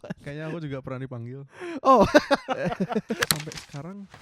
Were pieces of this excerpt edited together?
yes; 1 cut; at 3.2 s

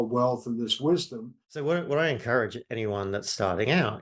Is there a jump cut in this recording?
yes; 1 cut; at 1.4 s

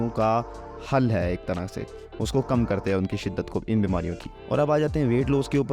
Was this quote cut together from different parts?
no; 0 cuts

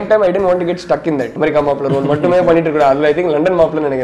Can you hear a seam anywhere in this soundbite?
yes; 1 cut; at 1.3 s

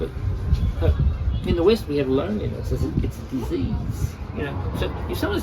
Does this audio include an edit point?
yes; 1 cut; at 4.2 s

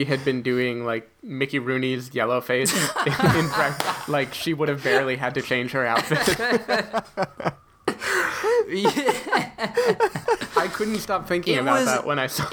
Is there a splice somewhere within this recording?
no; 0 cuts

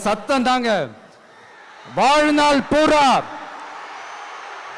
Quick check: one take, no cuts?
yes; 0 cuts

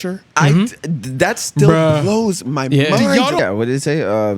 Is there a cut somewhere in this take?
yes; 1 cut; at 3.4 s

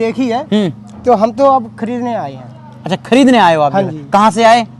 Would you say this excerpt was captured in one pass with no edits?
yes; 0 cuts

